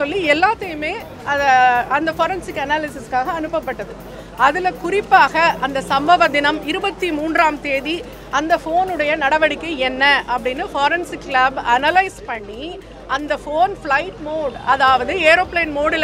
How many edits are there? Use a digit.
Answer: 0